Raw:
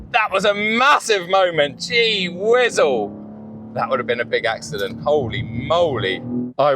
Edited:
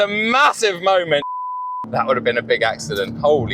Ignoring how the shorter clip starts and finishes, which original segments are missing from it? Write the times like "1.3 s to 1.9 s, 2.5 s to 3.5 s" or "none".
1.8 s to 3.2 s